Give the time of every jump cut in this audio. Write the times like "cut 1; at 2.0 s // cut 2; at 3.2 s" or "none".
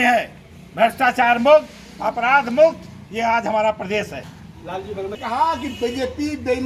cut 1; at 5.1 s

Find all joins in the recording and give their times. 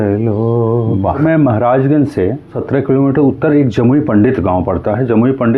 cut 1; at 1.2 s // cut 2; at 2.6 s

